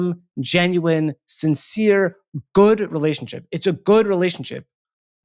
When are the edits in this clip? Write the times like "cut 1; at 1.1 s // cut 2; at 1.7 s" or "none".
none